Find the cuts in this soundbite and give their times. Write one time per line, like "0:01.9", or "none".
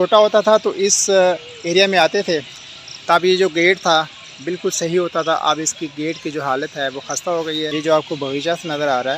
0:07.7